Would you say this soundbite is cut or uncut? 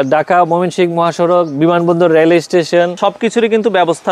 cut